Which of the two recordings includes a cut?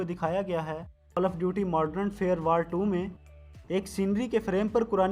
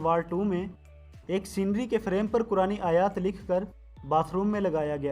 first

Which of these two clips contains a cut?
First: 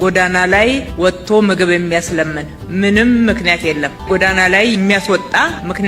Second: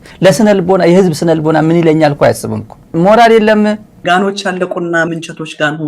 second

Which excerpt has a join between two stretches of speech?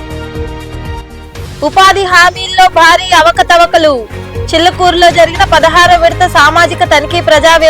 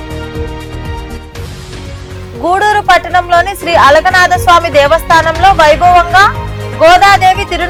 first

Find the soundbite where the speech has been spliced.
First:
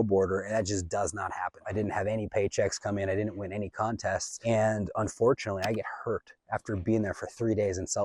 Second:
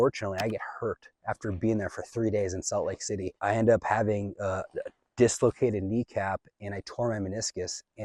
first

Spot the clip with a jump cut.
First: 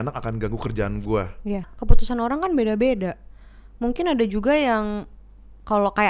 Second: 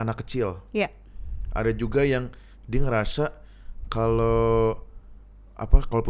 first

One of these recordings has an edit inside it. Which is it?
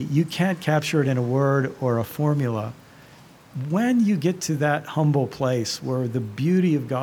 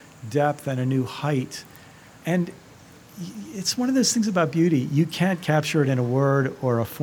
second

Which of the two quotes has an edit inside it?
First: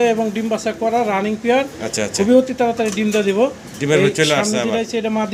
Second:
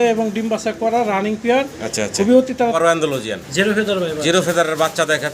second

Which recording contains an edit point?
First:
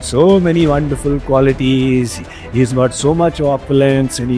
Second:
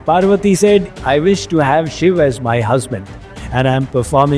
second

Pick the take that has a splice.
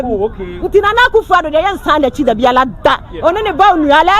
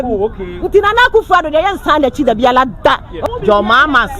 second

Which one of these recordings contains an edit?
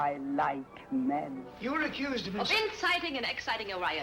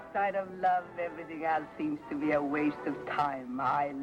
first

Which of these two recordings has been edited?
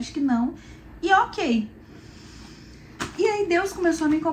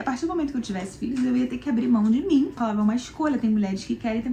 second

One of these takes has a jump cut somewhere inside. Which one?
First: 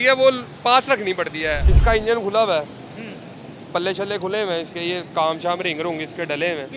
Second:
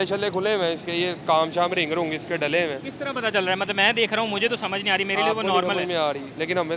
first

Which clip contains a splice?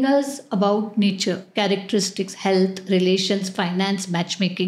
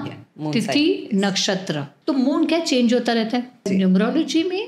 second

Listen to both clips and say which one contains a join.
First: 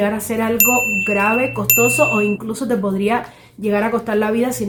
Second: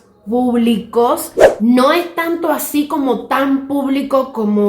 second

